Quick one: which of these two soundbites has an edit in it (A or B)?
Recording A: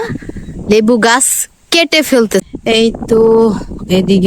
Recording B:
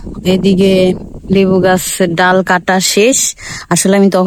A